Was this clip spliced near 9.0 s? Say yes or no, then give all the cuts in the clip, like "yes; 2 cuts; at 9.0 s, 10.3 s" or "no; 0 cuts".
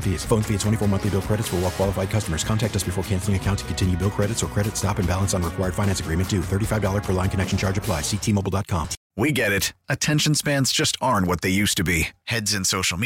yes; 1 cut; at 9.0 s